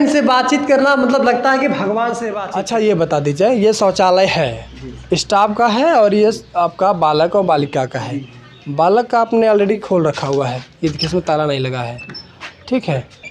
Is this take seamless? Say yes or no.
no